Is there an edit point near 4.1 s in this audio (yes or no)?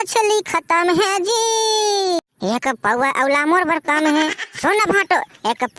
no